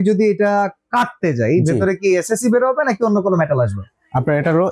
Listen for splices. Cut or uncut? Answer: uncut